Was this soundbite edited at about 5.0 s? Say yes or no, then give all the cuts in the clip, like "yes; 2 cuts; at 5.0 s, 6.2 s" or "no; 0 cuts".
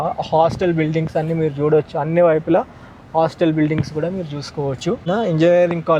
yes; 1 cut; at 5.0 s